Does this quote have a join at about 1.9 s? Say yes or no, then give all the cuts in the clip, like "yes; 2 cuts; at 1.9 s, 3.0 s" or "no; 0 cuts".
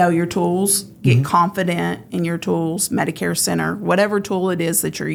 no; 0 cuts